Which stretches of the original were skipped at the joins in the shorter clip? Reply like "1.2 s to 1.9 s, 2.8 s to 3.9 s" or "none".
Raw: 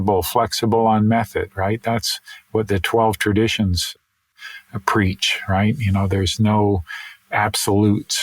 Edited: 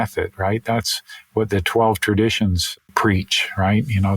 3.9 s to 4.6 s